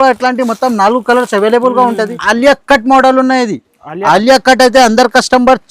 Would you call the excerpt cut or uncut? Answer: cut